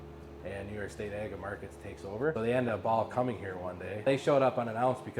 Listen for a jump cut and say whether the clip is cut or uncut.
cut